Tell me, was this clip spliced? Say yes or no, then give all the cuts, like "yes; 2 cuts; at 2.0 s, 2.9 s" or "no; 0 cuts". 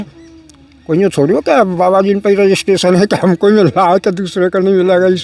no; 0 cuts